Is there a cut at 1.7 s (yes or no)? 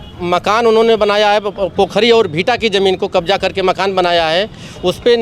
yes